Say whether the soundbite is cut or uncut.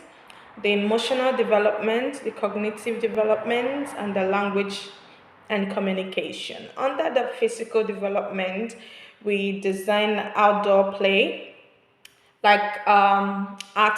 uncut